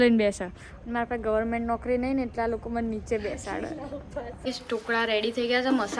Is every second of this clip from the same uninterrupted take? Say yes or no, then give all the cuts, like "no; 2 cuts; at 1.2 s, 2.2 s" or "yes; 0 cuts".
no; 1 cut; at 4.3 s